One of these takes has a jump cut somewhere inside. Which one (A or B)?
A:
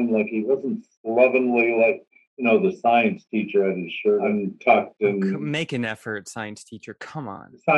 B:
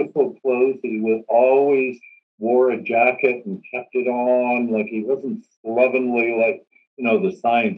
A